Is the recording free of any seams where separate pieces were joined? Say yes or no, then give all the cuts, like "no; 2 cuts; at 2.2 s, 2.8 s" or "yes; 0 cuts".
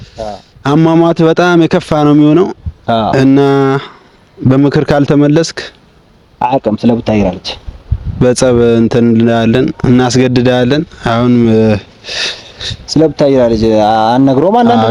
yes; 0 cuts